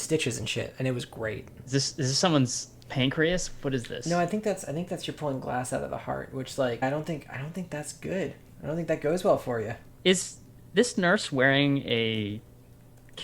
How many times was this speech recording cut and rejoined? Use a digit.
3